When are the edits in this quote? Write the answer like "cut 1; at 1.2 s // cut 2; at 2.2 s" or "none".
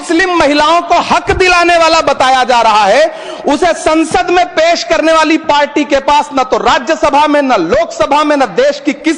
none